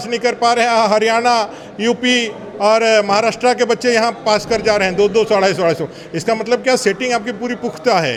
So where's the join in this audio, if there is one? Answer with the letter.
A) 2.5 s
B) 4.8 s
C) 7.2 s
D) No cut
D